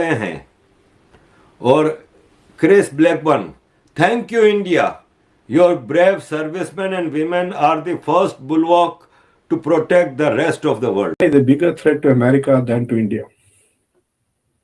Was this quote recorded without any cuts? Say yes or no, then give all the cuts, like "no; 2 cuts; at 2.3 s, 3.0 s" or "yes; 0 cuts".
no; 1 cut; at 11.1 s